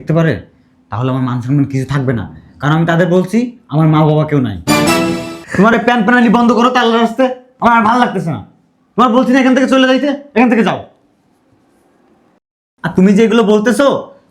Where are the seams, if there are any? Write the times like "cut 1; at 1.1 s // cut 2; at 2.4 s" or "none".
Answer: cut 1; at 5.4 s